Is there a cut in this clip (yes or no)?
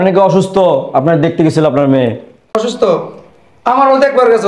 yes